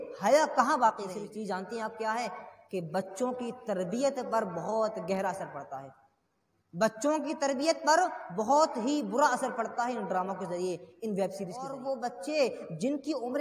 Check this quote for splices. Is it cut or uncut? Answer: cut